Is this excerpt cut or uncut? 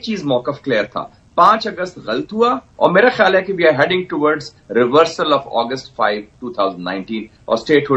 cut